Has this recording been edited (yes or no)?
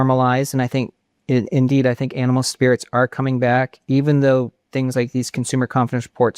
no